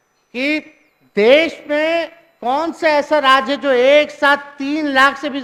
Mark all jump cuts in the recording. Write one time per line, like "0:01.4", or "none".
none